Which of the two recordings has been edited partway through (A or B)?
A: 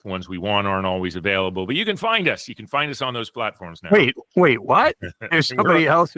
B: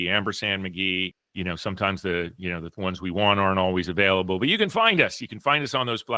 B